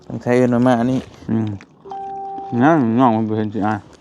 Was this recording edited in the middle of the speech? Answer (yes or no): yes